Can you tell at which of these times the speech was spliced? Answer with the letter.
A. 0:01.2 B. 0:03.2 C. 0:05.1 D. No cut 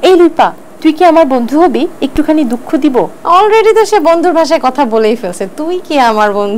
B